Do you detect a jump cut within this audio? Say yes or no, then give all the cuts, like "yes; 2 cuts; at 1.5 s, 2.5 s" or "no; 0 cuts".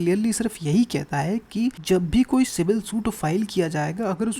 yes; 1 cut; at 1.8 s